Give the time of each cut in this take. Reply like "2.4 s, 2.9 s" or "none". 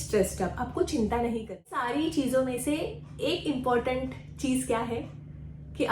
1.9 s